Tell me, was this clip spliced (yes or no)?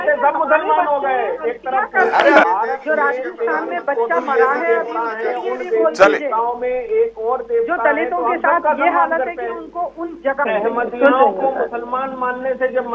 yes